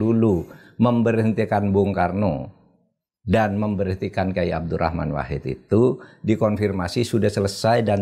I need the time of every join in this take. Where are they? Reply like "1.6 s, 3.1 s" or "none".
none